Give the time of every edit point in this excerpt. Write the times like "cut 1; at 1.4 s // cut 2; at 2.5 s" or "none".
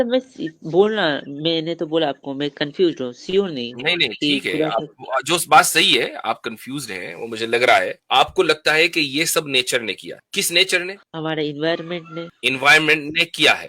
cut 1; at 8.0 s // cut 2; at 10.1 s // cut 3; at 11.0 s // cut 4; at 12.3 s